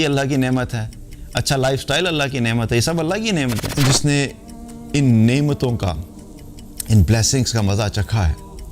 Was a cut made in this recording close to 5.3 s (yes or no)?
no